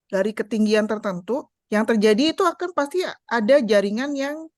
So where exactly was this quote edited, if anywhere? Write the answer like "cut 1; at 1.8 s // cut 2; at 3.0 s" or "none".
cut 1; at 1.5 s